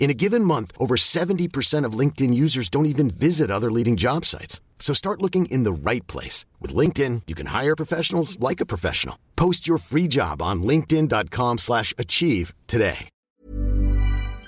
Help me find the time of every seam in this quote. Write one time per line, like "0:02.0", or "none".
0:13.4